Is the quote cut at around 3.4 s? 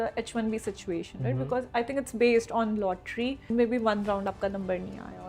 yes; 1 cut; at 3.4 s

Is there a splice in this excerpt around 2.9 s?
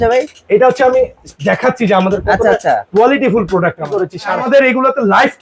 no; 1 cut; at 4.4 s

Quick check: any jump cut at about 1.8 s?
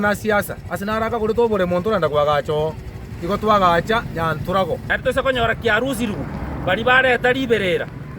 no; 1 cut; at 4.9 s

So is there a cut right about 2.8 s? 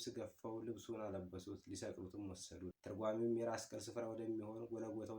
yes; 1 cut; at 2.8 s

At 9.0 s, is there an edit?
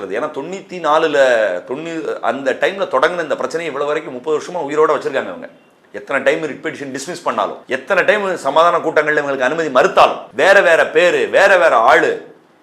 no; 2 cuts; at 7.6 s, 10.2 s

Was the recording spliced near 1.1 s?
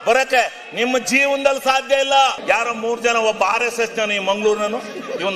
no; 1 cut; at 2.4 s

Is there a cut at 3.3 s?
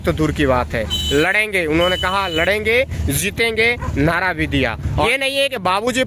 no; 1 cut; at 5.1 s

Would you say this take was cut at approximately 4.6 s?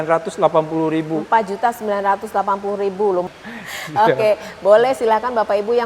no; 1 cut; at 3.3 s

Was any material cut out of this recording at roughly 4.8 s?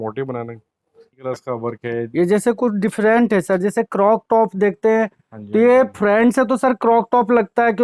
no; 1 cut; at 1.2 s

